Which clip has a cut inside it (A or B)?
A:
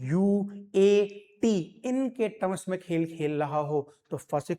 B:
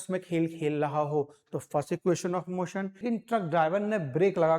B